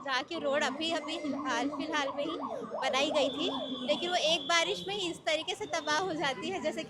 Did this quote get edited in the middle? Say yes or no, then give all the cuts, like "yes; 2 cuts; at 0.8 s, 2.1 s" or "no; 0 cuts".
no; 0 cuts